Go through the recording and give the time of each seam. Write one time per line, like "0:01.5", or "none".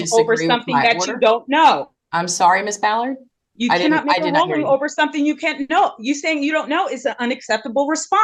none